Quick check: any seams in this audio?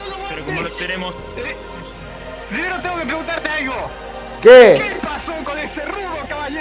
no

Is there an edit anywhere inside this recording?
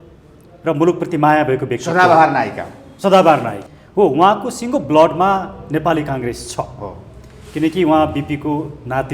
yes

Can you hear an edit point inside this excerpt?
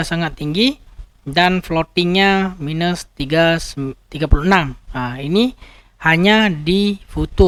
no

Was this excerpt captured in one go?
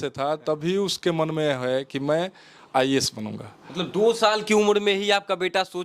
yes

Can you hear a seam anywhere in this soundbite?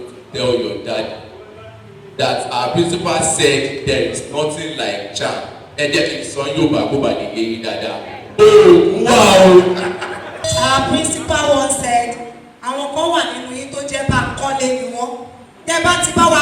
yes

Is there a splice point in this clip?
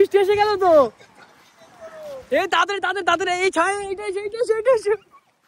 no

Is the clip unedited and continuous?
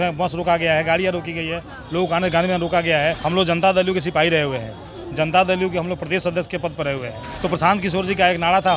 no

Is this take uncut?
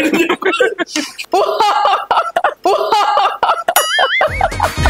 no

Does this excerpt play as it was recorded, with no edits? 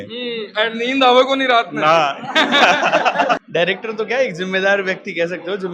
no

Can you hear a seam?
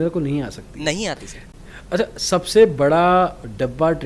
yes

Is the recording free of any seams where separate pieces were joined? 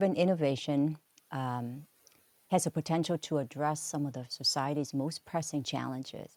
yes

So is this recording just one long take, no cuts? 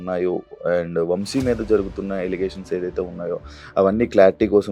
yes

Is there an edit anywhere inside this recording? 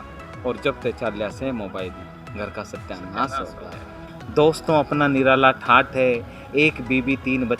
yes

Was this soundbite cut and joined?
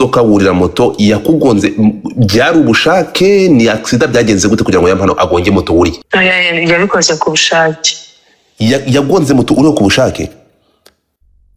yes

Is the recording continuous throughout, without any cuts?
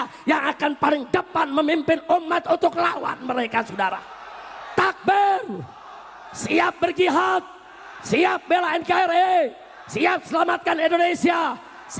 yes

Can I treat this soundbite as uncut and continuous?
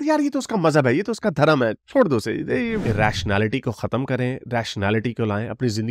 no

